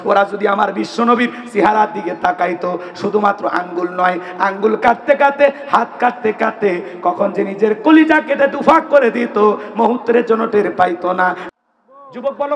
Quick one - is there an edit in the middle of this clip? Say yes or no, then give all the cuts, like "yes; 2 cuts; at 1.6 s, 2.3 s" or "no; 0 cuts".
yes; 1 cut; at 11.4 s